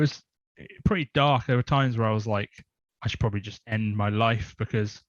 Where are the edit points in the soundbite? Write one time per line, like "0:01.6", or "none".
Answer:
none